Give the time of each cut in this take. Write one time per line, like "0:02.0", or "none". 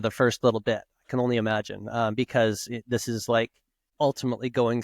0:03.8